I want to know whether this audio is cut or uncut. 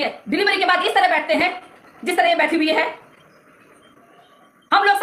uncut